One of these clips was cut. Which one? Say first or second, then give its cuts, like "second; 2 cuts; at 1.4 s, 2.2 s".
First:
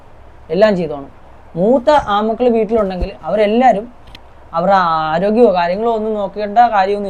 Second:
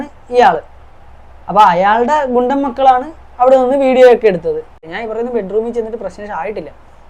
second; 1 cut; at 4.9 s